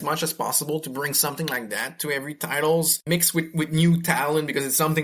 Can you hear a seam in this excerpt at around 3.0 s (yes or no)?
yes